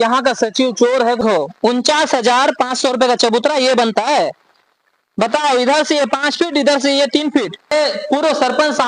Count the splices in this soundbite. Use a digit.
2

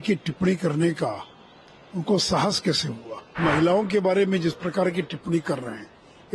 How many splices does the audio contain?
1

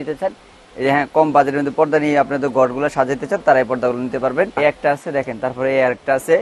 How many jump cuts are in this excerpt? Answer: 1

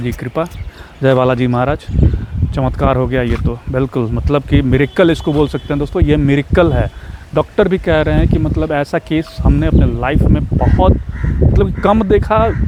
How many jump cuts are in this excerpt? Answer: 0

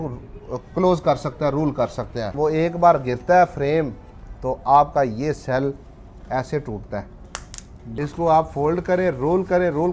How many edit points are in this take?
2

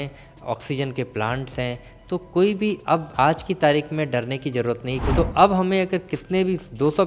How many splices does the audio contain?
1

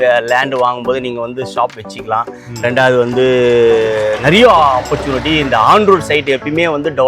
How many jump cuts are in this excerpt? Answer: 0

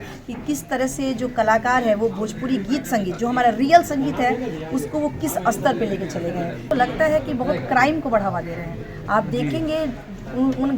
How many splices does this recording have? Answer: 1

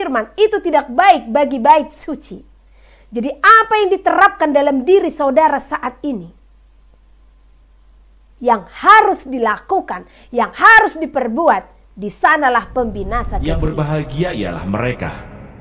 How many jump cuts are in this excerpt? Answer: 1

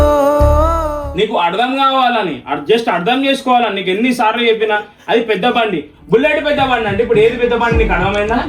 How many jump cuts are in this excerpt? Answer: 1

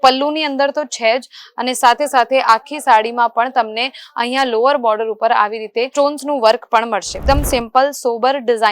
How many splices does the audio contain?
1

